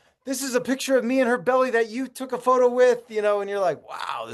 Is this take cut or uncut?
uncut